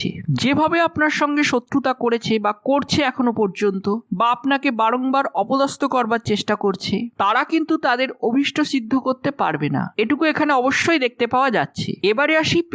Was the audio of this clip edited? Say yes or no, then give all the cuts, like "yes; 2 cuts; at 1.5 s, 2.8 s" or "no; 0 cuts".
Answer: no; 0 cuts